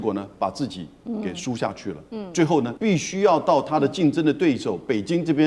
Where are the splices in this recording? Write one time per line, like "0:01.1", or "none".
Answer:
0:00.9
0:02.7